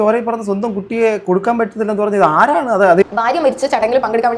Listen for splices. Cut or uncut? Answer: cut